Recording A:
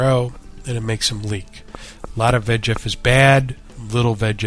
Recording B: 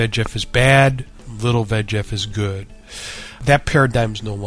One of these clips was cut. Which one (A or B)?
B